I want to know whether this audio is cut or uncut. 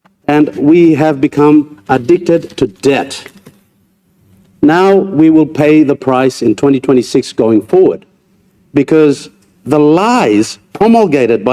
uncut